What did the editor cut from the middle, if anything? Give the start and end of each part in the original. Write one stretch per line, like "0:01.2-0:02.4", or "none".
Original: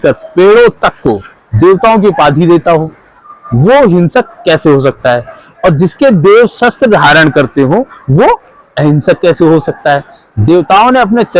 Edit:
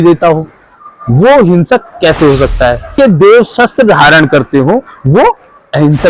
0:05.3-0:05.9